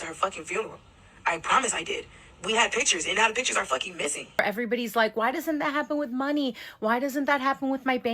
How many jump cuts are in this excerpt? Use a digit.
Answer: 1